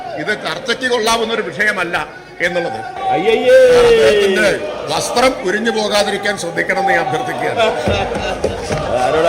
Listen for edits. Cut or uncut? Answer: cut